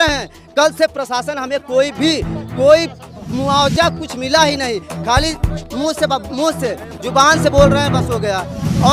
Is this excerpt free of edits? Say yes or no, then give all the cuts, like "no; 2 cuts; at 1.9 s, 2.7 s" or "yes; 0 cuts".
yes; 0 cuts